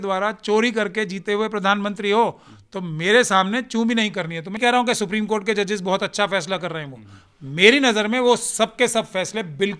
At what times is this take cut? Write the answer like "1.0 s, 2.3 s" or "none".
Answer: 4.6 s